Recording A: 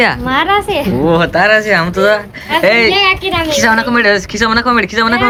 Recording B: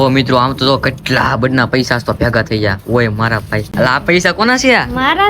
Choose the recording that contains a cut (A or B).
B